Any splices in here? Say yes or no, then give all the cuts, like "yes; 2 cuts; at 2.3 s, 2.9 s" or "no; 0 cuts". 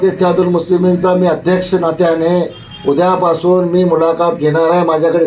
no; 0 cuts